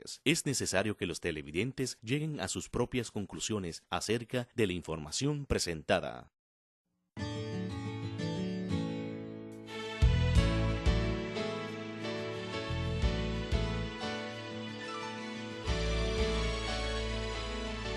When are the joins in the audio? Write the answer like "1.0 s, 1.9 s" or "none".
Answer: none